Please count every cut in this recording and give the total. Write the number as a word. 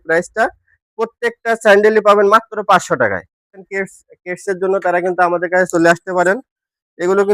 two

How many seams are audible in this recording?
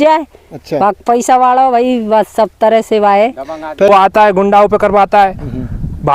one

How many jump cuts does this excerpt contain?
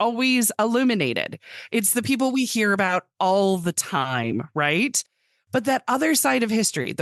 zero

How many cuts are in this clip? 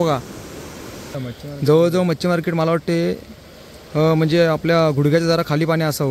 one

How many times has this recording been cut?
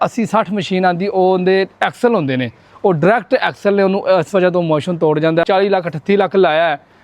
one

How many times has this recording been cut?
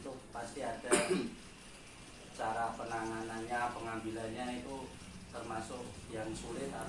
zero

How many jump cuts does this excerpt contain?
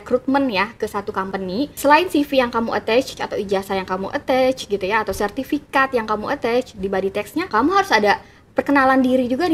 three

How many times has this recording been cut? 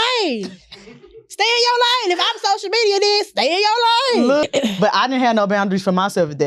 one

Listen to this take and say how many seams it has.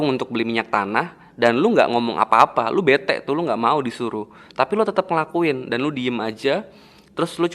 zero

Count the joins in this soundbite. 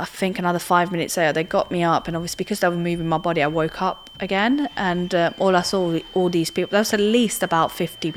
zero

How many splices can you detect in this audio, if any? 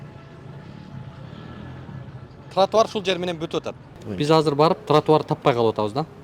one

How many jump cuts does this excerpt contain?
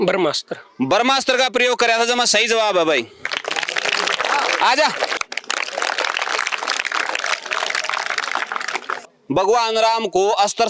two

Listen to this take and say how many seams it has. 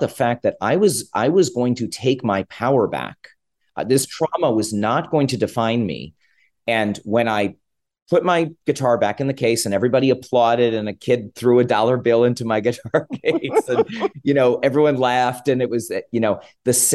zero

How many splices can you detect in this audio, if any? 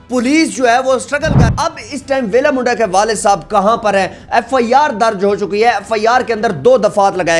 one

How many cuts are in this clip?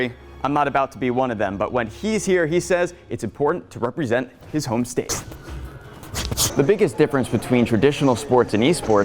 one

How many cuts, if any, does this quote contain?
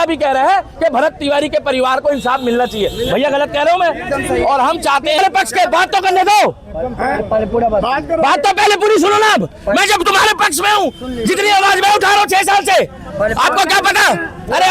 one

